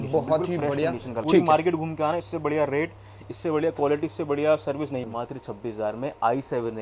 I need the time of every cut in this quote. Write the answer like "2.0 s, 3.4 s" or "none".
1.1 s, 5.1 s